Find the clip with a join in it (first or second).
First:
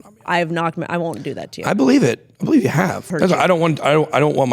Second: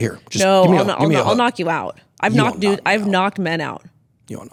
first